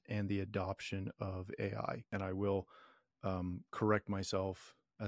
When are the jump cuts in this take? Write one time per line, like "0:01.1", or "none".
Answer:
0:02.1